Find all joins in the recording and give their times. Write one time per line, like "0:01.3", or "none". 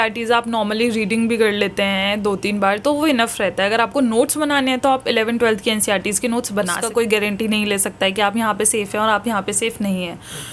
0:06.8